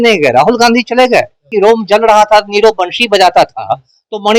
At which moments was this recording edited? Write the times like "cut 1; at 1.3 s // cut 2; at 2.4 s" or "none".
cut 1; at 1.5 s